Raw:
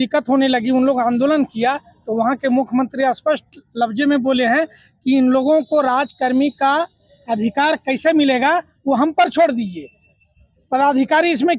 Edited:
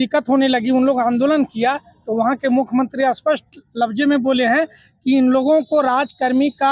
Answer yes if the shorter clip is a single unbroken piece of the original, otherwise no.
yes